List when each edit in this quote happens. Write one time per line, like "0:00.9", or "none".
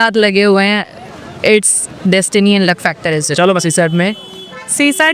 none